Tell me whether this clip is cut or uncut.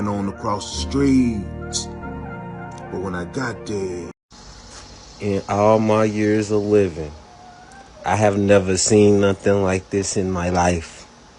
cut